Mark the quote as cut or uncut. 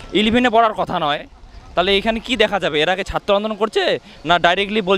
uncut